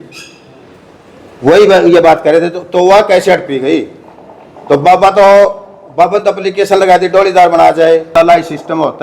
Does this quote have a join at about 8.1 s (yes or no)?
yes